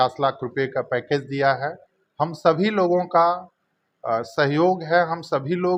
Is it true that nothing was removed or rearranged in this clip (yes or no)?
yes